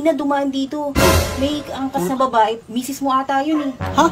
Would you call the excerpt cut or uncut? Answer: cut